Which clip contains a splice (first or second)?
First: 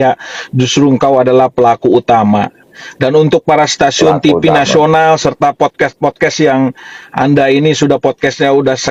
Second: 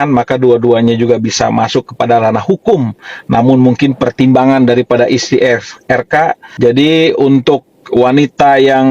second